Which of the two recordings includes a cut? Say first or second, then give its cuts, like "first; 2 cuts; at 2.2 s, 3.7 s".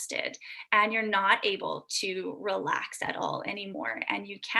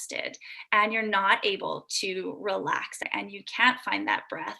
second; 1 cut; at 3.0 s